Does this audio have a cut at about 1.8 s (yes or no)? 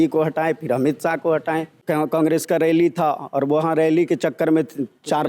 yes